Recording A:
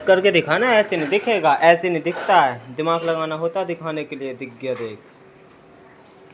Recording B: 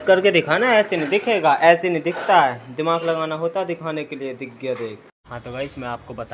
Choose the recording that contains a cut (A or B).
B